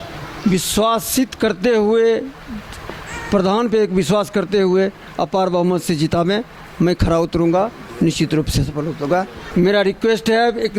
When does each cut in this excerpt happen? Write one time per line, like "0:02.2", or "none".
0:09.4